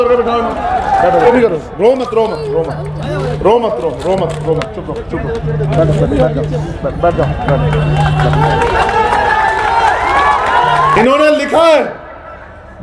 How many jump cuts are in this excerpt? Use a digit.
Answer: 2